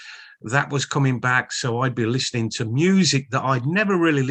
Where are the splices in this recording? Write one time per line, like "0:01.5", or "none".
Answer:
none